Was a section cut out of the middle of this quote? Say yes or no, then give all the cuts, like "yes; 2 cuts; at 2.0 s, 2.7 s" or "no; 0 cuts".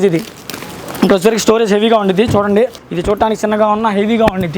yes; 1 cut; at 2.9 s